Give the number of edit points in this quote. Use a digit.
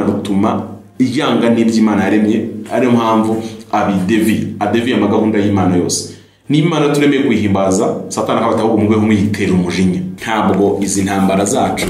1